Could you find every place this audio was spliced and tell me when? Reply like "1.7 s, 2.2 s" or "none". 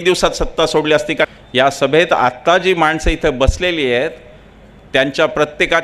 1.3 s